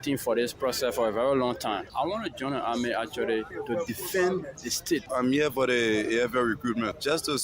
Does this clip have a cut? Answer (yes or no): yes